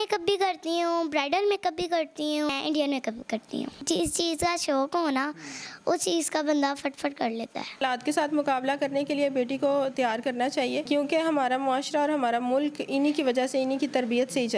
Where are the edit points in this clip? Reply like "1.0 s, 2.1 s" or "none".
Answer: 2.5 s, 3.8 s, 7.8 s, 10.9 s